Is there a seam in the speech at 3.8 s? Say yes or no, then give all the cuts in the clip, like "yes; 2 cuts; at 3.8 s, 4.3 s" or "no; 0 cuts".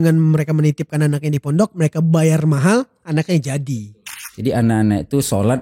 yes; 1 cut; at 3.8 s